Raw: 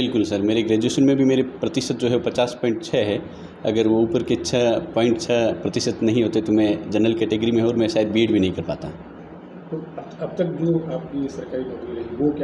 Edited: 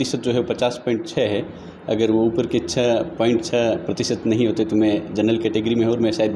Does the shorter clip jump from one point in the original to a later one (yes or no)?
no